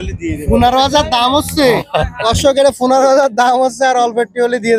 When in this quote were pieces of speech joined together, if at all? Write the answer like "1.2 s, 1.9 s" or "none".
none